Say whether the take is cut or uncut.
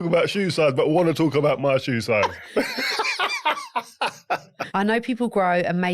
cut